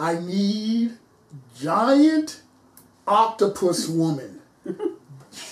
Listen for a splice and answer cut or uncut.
uncut